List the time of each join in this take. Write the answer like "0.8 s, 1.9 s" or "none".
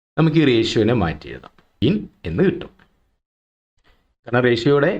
1.8 s